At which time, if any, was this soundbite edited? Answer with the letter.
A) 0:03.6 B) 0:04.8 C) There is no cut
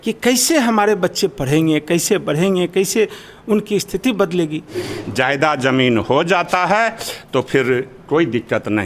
B